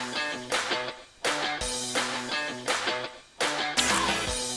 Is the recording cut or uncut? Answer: cut